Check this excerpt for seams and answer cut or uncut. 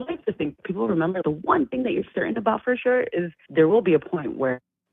cut